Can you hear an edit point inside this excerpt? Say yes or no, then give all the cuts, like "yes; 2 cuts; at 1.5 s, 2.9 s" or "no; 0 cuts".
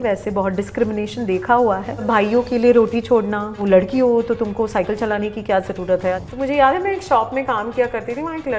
yes; 3 cuts; at 2.0 s, 3.6 s, 6.2 s